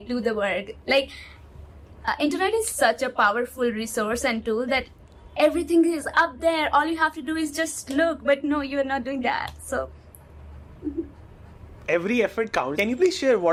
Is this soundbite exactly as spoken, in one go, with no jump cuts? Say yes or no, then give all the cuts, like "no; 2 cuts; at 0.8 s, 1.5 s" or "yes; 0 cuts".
yes; 0 cuts